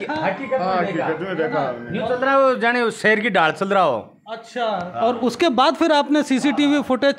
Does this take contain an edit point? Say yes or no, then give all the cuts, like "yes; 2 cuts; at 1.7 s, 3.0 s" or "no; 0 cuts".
no; 0 cuts